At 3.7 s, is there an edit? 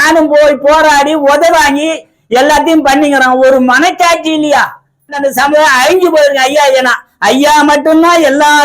no; 1 cut; at 5.2 s

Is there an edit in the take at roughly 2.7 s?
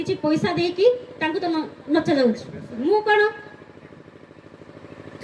yes; 1 cut; at 2.7 s

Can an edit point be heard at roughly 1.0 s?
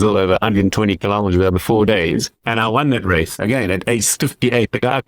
no; 2 cuts; at 2.4 s, 3.3 s

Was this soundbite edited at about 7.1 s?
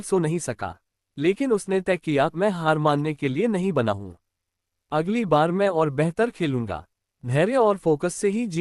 yes; 1 cut; at 7.1 s

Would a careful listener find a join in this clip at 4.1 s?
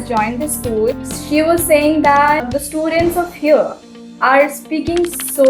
no; 2 cuts; at 1.1 s, 2.4 s

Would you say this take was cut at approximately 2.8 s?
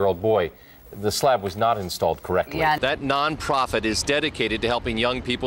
yes; 1 cut; at 2.8 s

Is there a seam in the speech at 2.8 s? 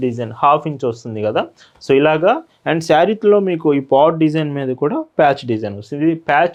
no; 0 cuts

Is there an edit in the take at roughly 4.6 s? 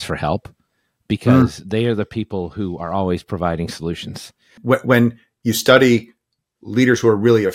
yes; 1 cut; at 4.6 s

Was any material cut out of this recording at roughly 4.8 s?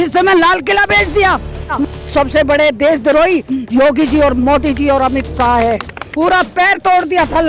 no; 2 cuts; at 1.8 s, 6.0 s

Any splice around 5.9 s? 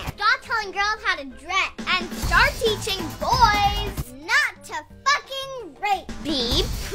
yes; 1 cut; at 5.9 s

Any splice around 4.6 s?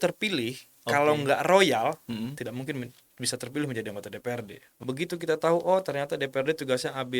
yes; 1 cut; at 4.6 s

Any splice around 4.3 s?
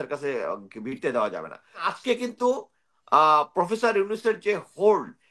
no; 1 cut; at 1.9 s

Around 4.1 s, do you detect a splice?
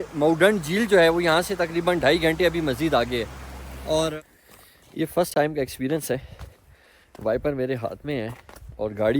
yes; 1 cut; at 4.1 s

